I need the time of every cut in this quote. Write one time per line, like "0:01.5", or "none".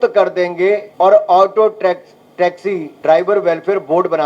0:00.9
0:02.9